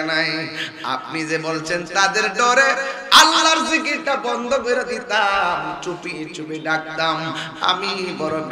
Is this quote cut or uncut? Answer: uncut